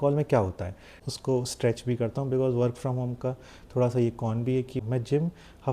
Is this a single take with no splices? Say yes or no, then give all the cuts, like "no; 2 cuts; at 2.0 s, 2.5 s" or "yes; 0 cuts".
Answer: no; 2 cuts; at 0.9 s, 4.7 s